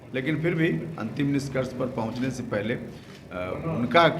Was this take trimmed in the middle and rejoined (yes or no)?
no